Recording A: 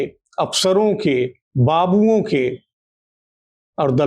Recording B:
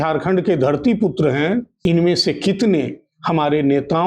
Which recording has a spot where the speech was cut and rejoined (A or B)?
B